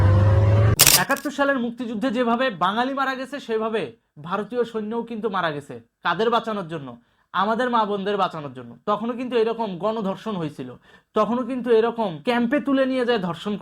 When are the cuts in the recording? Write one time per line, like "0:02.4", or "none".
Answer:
0:12.2